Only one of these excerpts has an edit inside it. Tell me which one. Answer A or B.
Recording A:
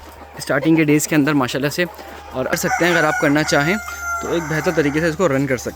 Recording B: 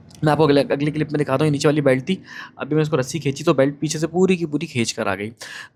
A